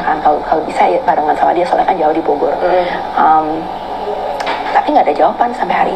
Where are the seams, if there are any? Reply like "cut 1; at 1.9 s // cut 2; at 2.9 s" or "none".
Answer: none